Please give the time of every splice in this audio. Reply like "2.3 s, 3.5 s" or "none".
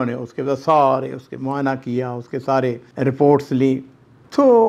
2.8 s